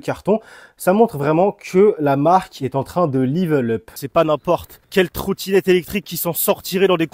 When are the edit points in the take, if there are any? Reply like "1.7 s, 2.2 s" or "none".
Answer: 3.9 s, 4.8 s

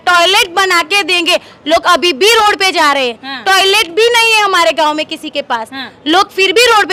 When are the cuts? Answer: none

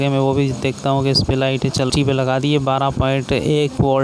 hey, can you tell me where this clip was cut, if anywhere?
1.9 s

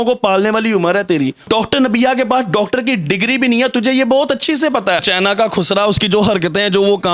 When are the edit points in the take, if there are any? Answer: 1.4 s, 5.1 s

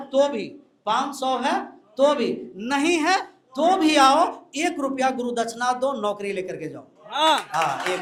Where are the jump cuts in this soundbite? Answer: none

